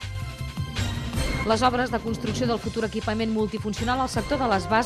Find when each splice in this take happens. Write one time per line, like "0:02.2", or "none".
0:02.0